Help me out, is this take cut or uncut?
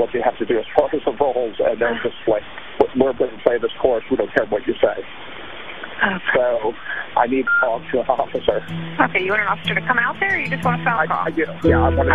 uncut